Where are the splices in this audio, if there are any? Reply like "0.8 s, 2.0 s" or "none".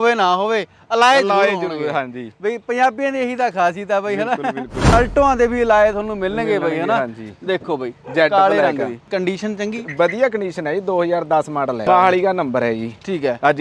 4.9 s, 9.1 s, 11.8 s